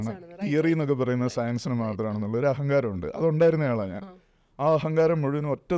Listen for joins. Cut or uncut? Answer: uncut